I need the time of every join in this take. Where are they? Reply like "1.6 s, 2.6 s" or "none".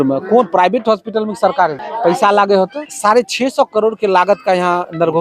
1.8 s, 2.9 s